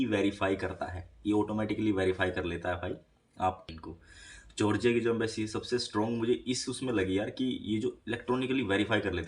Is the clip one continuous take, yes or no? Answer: no